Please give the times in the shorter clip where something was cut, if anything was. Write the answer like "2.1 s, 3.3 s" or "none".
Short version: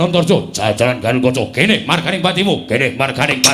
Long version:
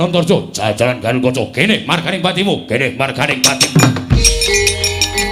none